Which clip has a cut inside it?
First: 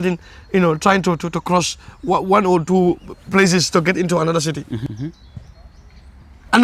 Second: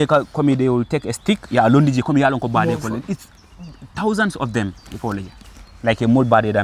first; 1 cut; at 4.9 s

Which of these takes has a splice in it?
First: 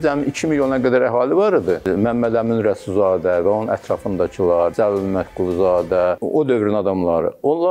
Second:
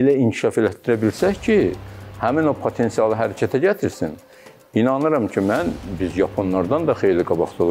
first; 3 cuts; at 1.9 s, 4.7 s, 6.2 s

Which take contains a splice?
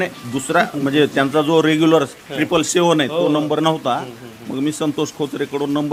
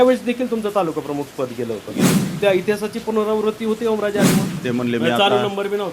second; 2 cuts; at 2.2 s, 4.6 s

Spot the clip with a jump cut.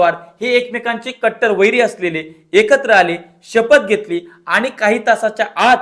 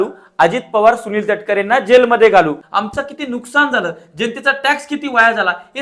second; 1 cut; at 2.6 s

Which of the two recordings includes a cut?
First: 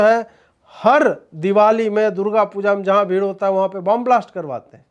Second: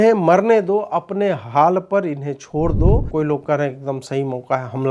second; 1 cut; at 3.1 s

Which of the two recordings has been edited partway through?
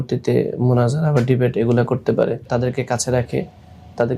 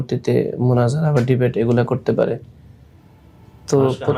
first; 1 cut; at 2.5 s

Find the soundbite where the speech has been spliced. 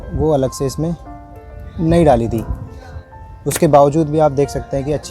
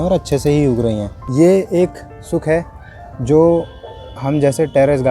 second; 1 cut; at 1.2 s

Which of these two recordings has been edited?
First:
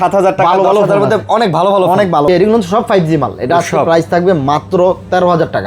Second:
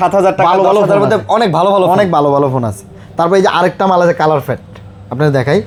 first; 1 cut; at 2.3 s

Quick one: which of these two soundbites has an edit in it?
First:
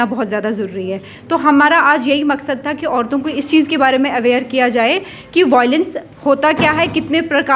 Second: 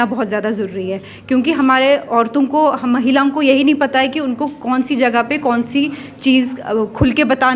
first; 1 cut; at 1.1 s

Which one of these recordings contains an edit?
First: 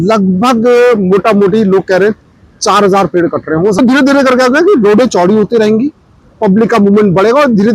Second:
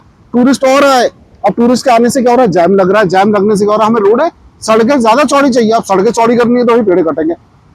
first; 1 cut; at 3.8 s

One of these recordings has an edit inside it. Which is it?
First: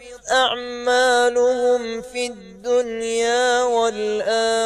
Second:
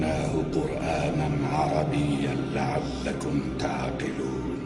first; 1 cut; at 1.7 s

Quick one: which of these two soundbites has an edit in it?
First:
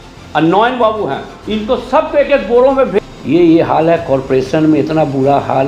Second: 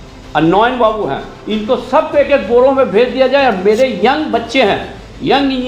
first; 1 cut; at 3.0 s

